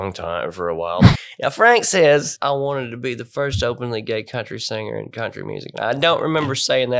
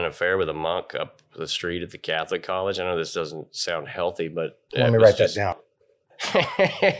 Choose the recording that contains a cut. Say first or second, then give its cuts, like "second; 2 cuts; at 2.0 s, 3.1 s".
first; 2 cuts; at 1.1 s, 2.3 s